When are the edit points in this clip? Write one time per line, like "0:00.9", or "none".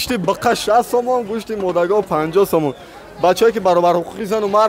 none